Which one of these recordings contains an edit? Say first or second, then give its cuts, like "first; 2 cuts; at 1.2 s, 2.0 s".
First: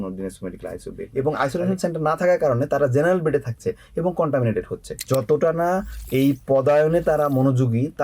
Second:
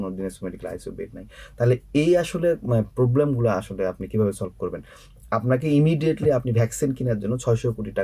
first; 2 cuts; at 1.0 s, 4.9 s